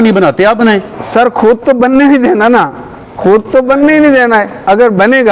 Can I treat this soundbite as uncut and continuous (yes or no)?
yes